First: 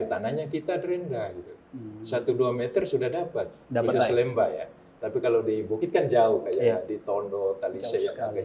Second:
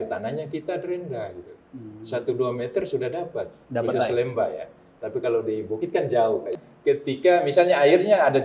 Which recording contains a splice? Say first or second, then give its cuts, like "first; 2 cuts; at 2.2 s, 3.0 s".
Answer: second; 1 cut; at 6.5 s